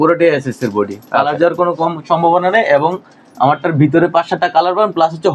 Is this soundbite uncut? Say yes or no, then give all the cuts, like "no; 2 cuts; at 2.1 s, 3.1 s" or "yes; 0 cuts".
yes; 0 cuts